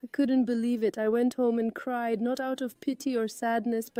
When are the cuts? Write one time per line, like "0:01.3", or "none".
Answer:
none